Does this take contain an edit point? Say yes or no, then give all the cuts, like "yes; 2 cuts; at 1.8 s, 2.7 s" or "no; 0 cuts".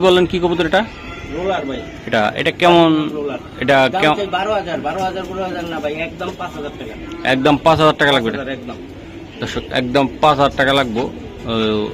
no; 0 cuts